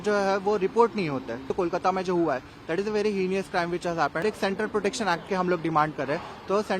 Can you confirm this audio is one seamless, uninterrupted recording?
no; 2 cuts; at 1.5 s, 4.2 s

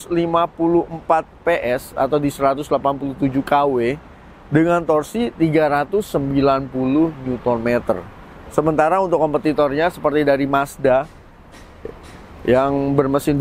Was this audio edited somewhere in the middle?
no; 0 cuts

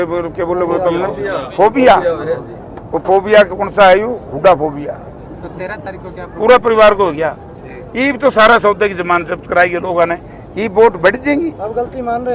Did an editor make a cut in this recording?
no; 0 cuts

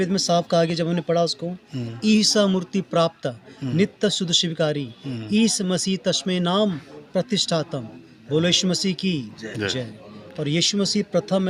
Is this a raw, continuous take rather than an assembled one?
yes; 0 cuts

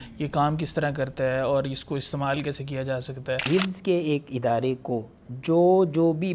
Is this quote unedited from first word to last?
no; 1 cut; at 3.4 s

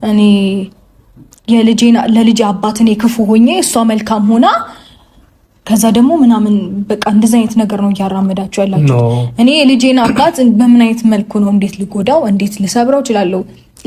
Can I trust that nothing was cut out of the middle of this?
yes; 0 cuts

